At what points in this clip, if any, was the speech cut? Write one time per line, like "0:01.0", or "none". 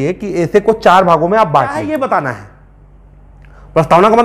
0:01.8